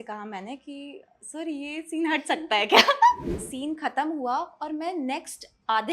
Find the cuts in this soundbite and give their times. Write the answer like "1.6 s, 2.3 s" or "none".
3.3 s